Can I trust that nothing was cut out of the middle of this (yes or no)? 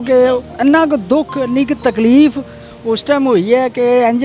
yes